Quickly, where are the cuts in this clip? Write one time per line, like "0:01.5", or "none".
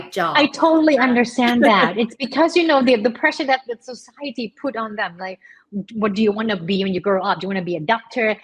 none